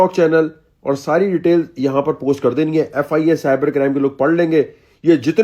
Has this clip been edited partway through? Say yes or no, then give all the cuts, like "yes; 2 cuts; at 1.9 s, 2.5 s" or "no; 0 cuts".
no; 0 cuts